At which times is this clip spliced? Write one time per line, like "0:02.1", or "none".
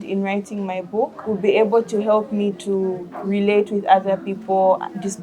0:01.2